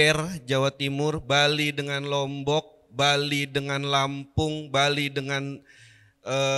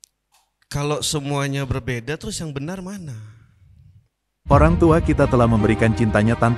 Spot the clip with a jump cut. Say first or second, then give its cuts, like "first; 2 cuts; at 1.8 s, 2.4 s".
second; 1 cut; at 4.3 s